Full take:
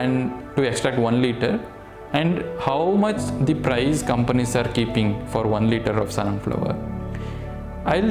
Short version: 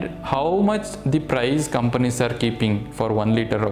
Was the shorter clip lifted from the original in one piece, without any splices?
yes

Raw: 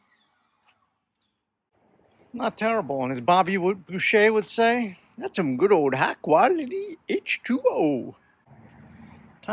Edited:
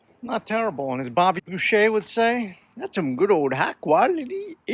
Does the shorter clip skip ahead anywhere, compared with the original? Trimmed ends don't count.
yes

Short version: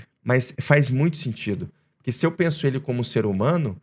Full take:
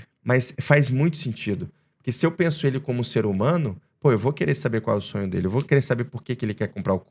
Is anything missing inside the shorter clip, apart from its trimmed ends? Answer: no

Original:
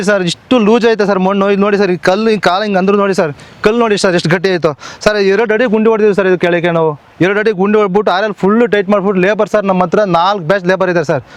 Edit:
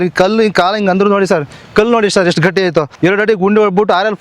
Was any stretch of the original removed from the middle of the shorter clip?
yes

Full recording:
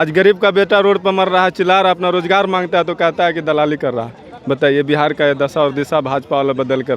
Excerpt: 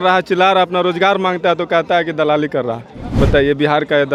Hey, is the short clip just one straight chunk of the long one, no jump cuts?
yes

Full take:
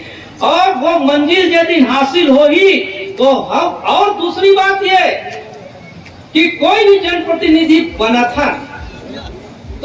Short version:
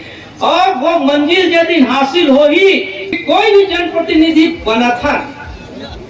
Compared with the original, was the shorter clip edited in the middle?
yes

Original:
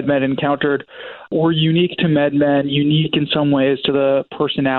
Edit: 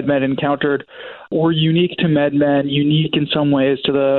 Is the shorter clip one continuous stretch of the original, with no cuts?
yes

